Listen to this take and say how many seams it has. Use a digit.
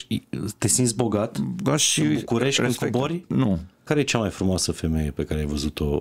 1